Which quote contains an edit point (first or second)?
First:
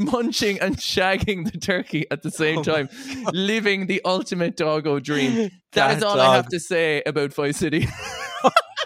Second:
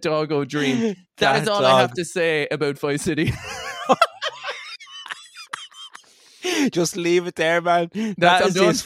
second